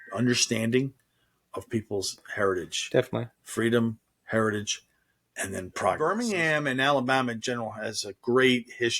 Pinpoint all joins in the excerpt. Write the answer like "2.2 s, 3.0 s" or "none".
6.0 s